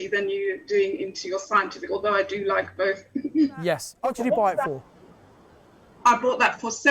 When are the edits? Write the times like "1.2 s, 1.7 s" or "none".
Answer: 3.9 s